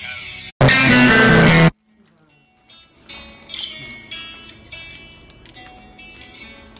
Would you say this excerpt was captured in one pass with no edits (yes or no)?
yes